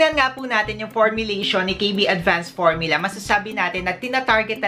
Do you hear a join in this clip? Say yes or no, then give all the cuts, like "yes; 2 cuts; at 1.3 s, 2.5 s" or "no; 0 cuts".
no; 0 cuts